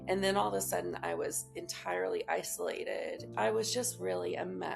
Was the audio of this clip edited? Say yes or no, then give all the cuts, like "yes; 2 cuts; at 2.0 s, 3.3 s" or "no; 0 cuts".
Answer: yes; 1 cut; at 3.2 s